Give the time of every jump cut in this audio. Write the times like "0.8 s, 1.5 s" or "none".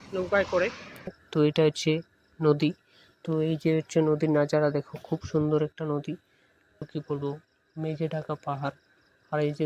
1.2 s, 6.8 s